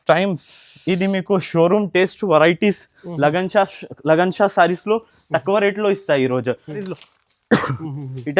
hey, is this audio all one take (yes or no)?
no